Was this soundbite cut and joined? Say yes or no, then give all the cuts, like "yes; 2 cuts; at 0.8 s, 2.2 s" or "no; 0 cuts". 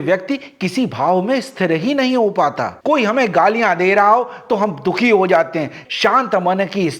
yes; 2 cuts; at 2.7 s, 5.8 s